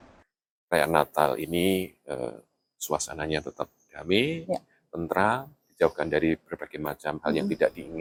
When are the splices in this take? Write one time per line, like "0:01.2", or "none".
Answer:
none